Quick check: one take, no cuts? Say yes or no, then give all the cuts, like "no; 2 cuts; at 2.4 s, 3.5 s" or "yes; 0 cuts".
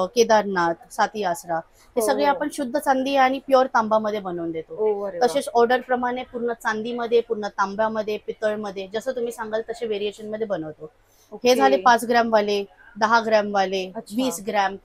yes; 0 cuts